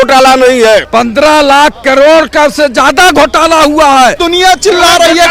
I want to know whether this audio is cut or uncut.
cut